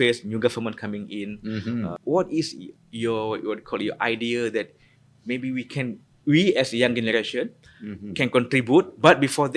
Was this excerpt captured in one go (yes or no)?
no